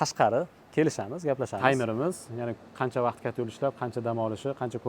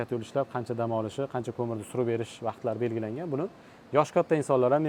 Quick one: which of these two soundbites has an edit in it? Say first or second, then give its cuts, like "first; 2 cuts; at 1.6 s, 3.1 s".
first; 1 cut; at 1.5 s